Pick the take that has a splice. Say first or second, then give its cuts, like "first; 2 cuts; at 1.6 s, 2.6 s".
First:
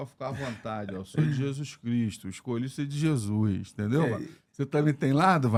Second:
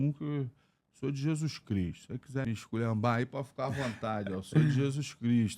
second; 1 cut; at 2.4 s